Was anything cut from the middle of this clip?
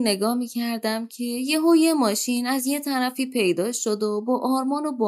no; 0 cuts

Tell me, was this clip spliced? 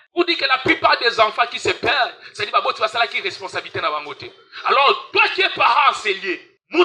no; 0 cuts

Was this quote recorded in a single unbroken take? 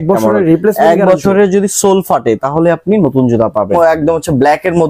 no; 1 cut; at 3.8 s

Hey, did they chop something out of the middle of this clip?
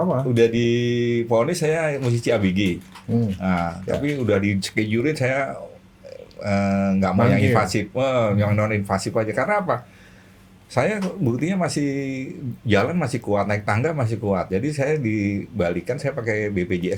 no; 0 cuts

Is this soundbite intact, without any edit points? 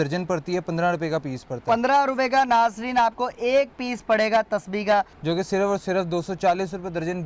no; 1 cut; at 5.2 s

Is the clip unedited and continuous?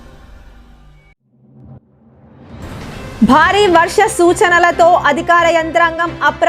no; 1 cut; at 1.1 s

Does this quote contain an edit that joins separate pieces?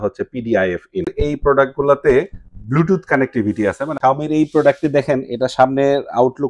yes; 2 cuts; at 1.1 s, 3.9 s

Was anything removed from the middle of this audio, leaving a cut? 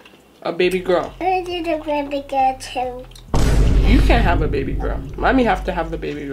yes; 1 cut; at 1.1 s

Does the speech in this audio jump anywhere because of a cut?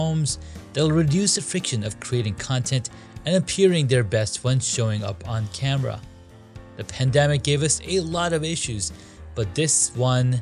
no; 0 cuts

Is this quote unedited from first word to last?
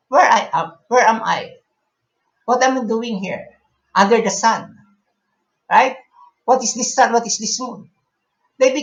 yes; 0 cuts

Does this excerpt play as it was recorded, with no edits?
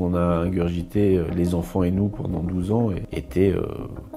no; 1 cut; at 3.1 s

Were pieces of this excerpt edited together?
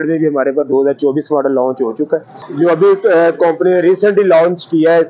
yes; 1 cut; at 2.4 s

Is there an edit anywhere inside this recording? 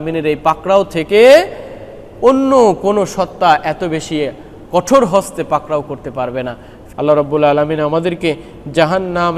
yes; 1 cut; at 6.7 s

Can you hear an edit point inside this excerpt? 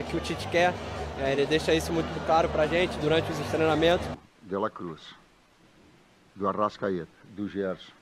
yes; 1 cut; at 4.1 s

